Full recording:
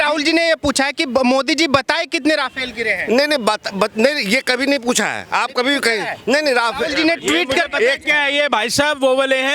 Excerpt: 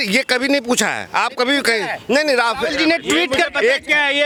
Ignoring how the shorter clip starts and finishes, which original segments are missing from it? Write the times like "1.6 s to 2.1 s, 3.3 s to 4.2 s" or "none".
none